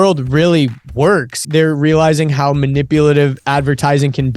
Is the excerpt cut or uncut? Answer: cut